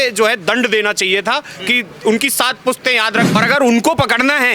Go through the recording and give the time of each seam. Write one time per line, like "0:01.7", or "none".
0:03.4